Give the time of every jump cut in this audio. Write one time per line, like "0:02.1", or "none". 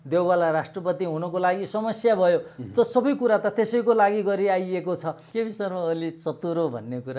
0:05.2